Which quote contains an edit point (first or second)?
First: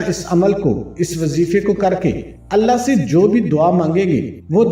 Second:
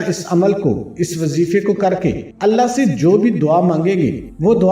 second